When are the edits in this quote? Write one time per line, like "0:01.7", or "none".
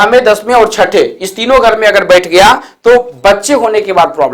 none